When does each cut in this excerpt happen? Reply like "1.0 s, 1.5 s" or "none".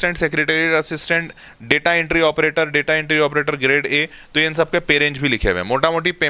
none